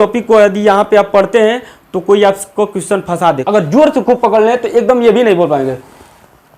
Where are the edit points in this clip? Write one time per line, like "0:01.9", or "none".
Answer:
0:03.4